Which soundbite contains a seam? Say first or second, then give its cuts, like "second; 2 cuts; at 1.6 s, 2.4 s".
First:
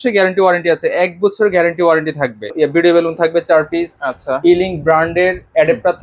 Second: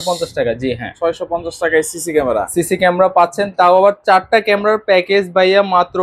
first; 1 cut; at 2.5 s